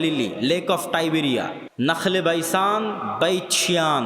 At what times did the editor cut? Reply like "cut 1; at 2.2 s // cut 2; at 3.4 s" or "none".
cut 1; at 1.6 s